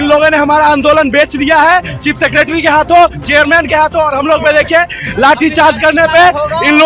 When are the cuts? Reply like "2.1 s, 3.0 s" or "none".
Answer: none